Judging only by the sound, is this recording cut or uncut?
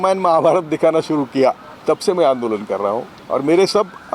cut